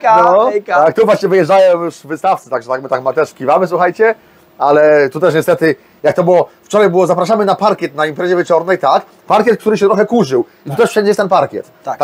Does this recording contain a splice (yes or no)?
no